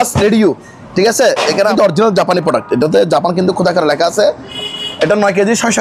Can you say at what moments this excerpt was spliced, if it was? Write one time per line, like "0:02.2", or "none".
0:01.7
0:04.5